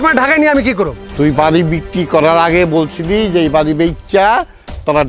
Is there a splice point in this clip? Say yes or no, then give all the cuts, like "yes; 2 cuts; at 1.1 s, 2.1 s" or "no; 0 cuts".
yes; 1 cut; at 1.0 s